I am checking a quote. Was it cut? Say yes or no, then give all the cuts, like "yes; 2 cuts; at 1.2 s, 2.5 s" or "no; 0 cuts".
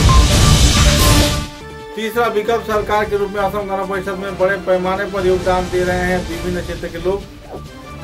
no; 0 cuts